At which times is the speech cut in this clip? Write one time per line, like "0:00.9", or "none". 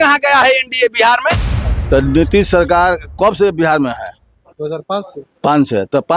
0:01.7